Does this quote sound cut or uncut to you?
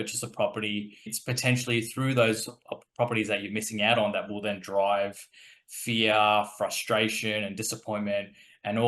cut